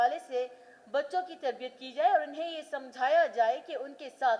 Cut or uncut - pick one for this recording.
uncut